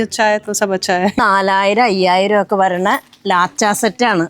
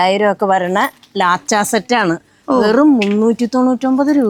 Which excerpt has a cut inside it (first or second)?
first